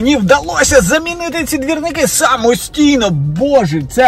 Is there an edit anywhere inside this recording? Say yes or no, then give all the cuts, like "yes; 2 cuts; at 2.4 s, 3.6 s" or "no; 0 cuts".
no; 0 cuts